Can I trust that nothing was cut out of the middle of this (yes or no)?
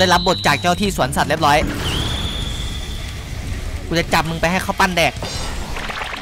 yes